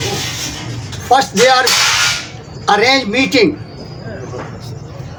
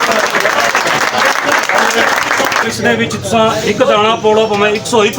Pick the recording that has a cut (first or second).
second